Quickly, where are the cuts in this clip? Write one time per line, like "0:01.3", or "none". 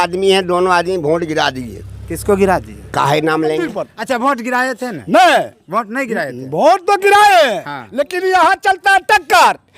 0:03.9